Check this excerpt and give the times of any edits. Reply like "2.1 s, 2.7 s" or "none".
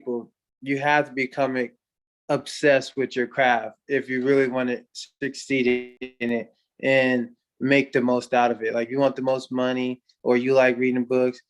6.0 s